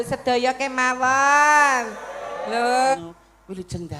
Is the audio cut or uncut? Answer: cut